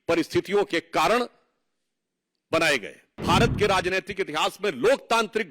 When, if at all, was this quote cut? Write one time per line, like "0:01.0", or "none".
0:03.2